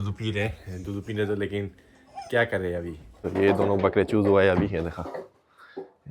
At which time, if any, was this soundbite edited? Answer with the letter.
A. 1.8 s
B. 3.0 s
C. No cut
B